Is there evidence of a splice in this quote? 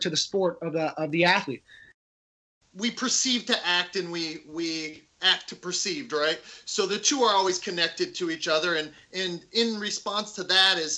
yes; 1 cut; at 2.1 s

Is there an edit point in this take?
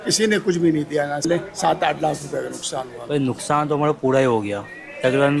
yes; 2 cuts; at 1.3 s, 3.0 s

